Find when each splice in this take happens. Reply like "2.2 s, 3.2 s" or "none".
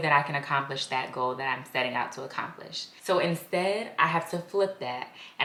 none